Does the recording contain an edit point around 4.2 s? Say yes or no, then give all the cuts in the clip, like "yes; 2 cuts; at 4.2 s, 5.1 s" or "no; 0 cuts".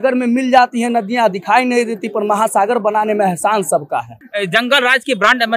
yes; 1 cut; at 4.2 s